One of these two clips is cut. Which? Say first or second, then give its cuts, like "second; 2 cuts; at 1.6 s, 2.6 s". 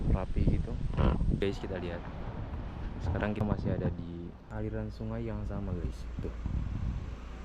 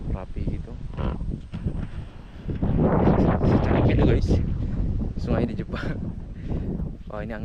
first; 3 cuts; at 1.4 s, 3.4 s, 4.4 s